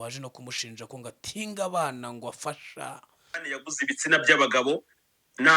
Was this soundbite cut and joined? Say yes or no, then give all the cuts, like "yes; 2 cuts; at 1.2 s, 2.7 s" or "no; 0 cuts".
yes; 1 cut; at 3.3 s